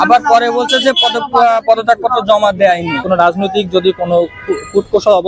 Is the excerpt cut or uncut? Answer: cut